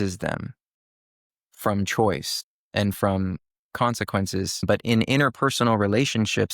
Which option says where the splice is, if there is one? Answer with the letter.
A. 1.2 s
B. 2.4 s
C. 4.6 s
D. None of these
C